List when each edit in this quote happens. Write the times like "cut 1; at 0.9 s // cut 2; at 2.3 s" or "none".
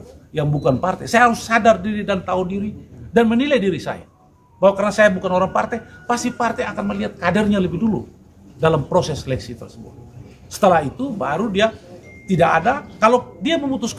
none